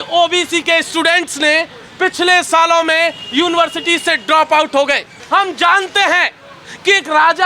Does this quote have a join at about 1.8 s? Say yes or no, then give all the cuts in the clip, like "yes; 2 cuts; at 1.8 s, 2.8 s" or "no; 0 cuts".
no; 1 cut; at 5.1 s